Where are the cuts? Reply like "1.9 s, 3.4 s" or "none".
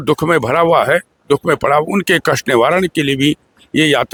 none